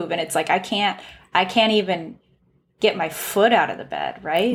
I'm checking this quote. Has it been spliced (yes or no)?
no